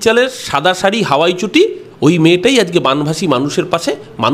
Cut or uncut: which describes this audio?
uncut